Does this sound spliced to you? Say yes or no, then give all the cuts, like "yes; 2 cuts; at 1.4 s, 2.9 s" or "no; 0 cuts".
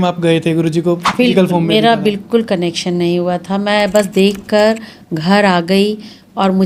no; 0 cuts